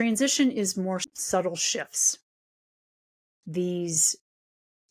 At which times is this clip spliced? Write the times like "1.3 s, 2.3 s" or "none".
1.1 s